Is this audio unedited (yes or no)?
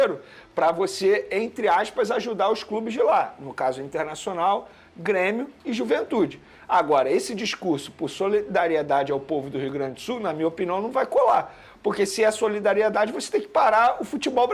yes